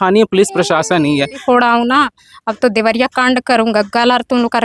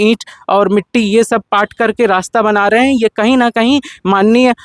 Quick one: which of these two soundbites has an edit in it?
first; 1 cut; at 1.4 s

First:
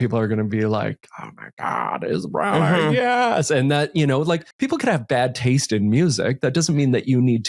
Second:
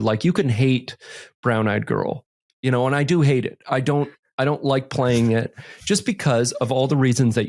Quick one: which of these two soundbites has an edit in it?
first; 1 cut; at 4.5 s

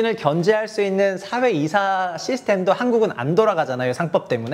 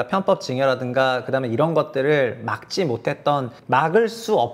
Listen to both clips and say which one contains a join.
second; 1 cut; at 3.5 s

